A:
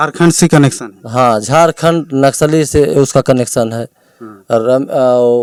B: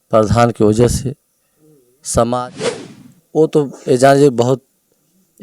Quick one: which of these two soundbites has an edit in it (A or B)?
B